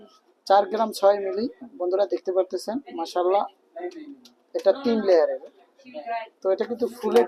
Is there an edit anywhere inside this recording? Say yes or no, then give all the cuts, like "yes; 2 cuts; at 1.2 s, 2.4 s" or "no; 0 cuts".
no; 0 cuts